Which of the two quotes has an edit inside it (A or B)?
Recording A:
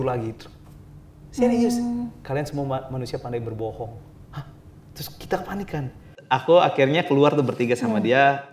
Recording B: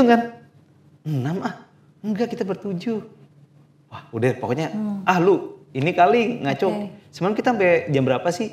A